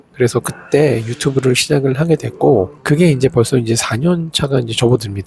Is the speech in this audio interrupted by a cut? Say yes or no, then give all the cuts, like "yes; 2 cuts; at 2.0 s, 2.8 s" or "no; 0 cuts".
no; 0 cuts